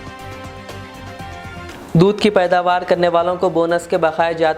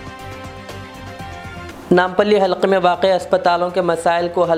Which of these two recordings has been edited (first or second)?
first